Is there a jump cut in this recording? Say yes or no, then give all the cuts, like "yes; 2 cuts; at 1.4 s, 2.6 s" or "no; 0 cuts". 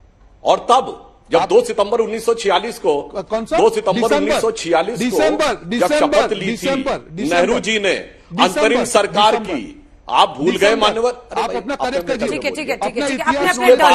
no; 0 cuts